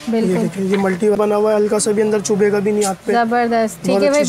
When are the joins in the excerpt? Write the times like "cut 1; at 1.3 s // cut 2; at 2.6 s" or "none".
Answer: cut 1; at 1.2 s